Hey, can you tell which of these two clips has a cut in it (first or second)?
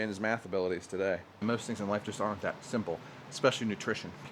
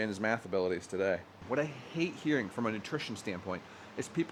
first